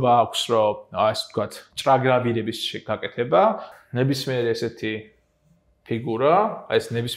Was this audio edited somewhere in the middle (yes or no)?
yes